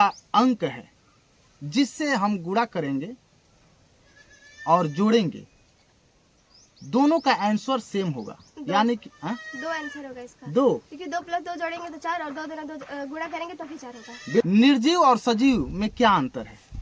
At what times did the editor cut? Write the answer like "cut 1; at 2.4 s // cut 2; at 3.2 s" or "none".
cut 1; at 14.4 s